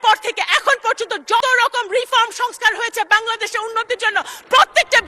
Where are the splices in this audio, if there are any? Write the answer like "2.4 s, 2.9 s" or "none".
1.4 s